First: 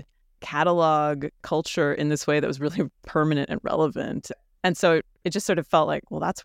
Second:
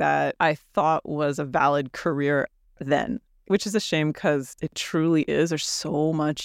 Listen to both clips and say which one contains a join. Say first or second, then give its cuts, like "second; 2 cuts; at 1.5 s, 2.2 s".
first; 1 cut; at 4.3 s